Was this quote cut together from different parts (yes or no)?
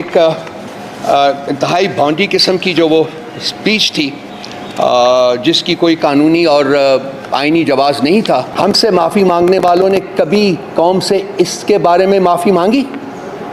yes